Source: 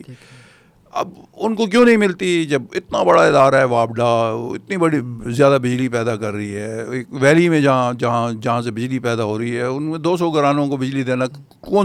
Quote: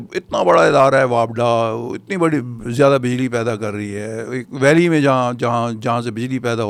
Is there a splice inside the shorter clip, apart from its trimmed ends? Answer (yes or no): no